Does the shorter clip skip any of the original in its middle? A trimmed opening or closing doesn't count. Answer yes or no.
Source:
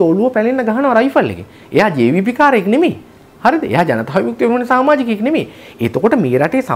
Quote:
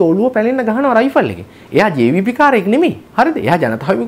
yes